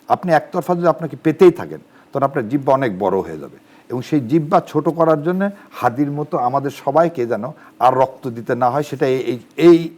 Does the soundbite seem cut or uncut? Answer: uncut